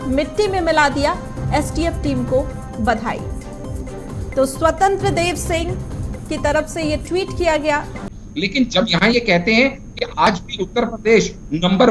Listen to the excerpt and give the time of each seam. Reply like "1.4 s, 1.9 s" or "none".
8.0 s